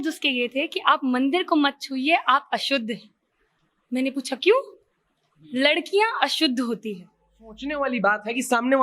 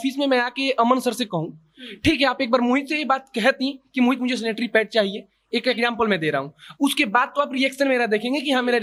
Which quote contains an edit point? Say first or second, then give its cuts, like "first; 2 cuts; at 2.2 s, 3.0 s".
first; 1 cut; at 7.6 s